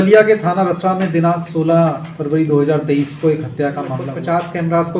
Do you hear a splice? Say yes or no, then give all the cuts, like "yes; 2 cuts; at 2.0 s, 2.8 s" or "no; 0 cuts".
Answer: yes; 1 cut; at 4.0 s